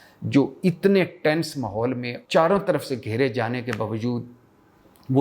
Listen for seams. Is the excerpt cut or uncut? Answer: cut